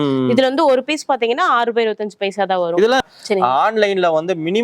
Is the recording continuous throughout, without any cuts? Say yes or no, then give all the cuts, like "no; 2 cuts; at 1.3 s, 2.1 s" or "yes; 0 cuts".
no; 1 cut; at 3.0 s